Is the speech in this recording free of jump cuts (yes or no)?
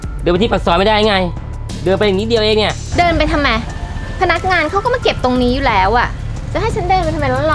yes